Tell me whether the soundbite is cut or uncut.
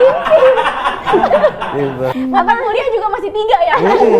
cut